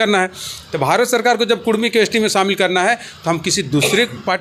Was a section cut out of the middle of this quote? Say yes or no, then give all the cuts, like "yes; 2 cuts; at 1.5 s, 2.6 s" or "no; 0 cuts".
no; 0 cuts